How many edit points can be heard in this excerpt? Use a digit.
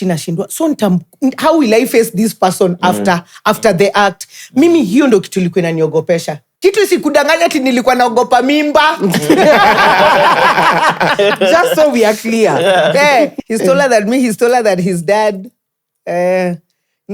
2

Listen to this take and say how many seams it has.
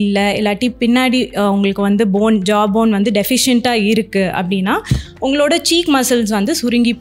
0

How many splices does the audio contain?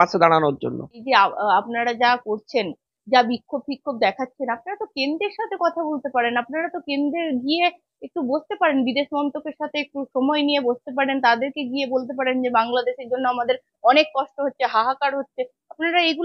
1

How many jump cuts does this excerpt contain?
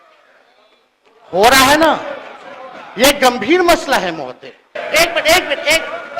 1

